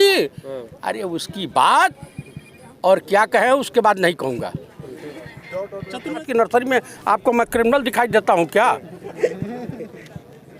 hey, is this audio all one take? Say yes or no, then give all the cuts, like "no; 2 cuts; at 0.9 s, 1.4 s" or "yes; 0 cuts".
no; 1 cut; at 6.2 s